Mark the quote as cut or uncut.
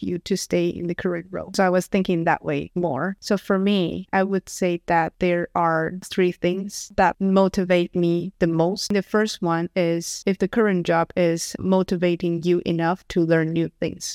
cut